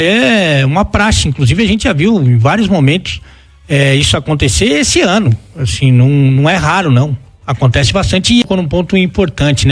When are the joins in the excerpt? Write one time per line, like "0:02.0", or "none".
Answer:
0:08.4